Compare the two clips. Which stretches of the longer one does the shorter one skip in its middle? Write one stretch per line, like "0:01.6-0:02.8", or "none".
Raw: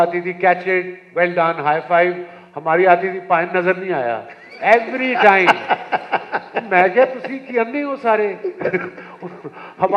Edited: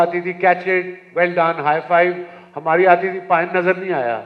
none